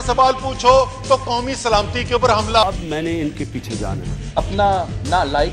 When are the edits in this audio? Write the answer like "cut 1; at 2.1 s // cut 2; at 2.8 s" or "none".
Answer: none